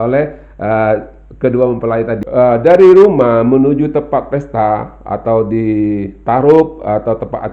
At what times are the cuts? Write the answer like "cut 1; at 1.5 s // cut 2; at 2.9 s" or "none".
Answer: cut 1; at 2.2 s

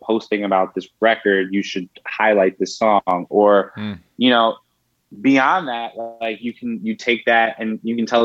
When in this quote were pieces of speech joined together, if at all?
none

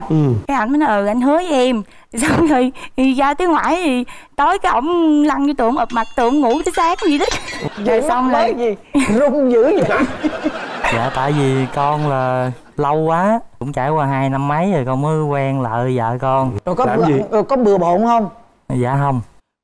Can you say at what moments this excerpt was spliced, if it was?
cut 1; at 7.7 s // cut 2; at 16.6 s

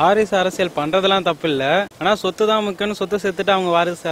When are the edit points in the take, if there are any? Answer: cut 1; at 1.9 s

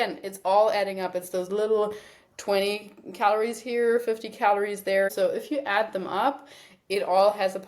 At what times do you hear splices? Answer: cut 1; at 5.1 s

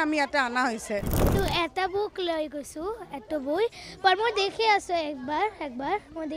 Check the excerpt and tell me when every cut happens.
cut 1; at 1.3 s

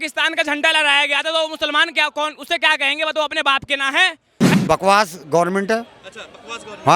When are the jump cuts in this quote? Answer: cut 1; at 4.3 s

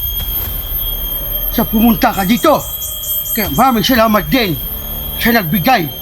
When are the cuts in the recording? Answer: cut 1; at 1.5 s

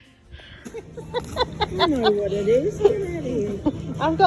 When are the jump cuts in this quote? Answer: cut 1; at 1.0 s

